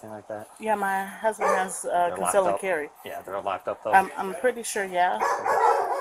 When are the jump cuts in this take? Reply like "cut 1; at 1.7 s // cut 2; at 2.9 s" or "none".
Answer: none